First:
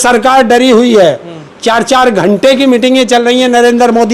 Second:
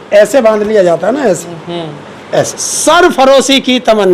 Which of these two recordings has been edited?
second; 1 cut; at 2.6 s

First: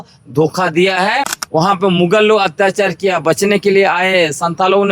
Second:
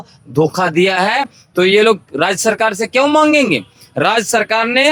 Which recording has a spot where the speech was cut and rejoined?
first; 1 cut; at 1.4 s

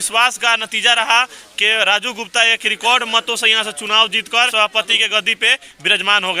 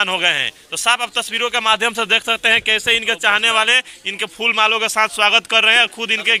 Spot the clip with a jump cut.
first; 1 cut; at 4.5 s

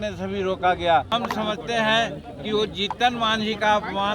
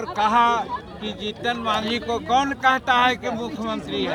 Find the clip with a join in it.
first; 1 cut; at 1.1 s

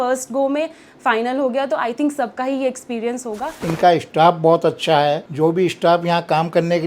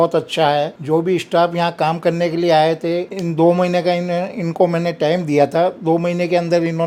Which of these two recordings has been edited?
first; 1 cut; at 3.6 s

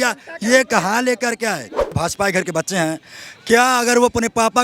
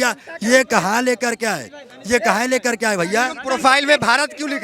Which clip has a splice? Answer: first; 1 cut; at 1.9 s

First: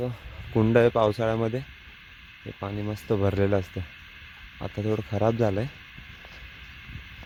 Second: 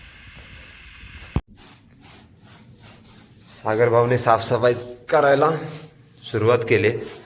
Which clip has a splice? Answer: second; 1 cut; at 1.5 s

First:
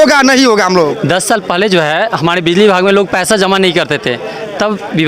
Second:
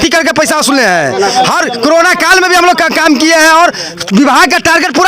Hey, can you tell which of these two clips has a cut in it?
first; 1 cut; at 0.9 s

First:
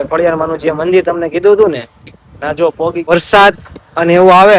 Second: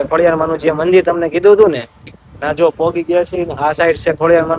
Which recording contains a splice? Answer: first; 1 cut; at 3.1 s

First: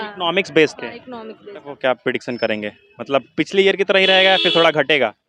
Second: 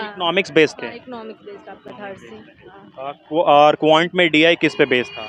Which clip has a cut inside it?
first; 1 cut; at 1.6 s

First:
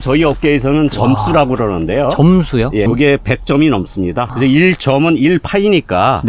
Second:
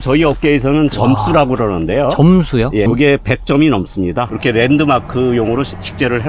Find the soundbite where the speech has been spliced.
second; 1 cut; at 4.3 s

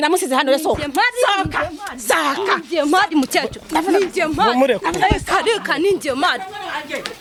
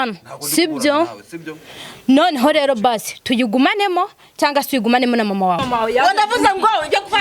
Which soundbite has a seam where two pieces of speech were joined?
second; 1 cut; at 5.6 s

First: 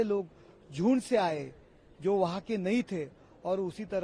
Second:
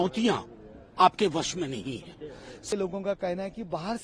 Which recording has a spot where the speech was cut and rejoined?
second; 1 cut; at 2.6 s

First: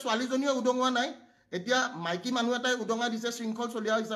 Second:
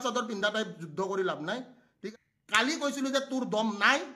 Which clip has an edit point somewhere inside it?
second; 1 cut; at 2.0 s

